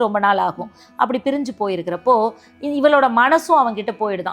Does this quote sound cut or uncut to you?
uncut